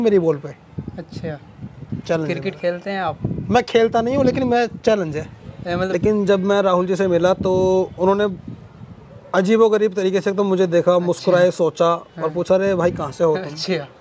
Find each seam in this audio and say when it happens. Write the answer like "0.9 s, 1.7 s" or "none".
5.9 s